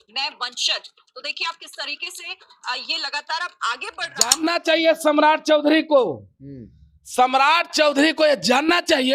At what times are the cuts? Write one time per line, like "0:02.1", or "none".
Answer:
0:04.4